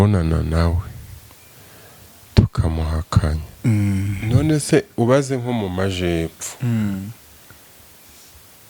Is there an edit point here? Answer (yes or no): yes